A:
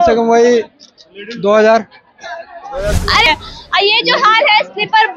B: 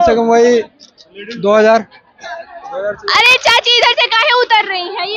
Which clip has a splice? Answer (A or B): A